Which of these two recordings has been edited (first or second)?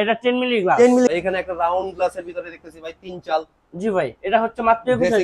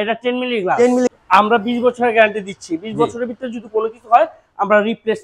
first